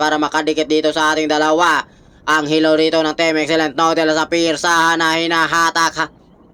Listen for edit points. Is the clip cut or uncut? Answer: uncut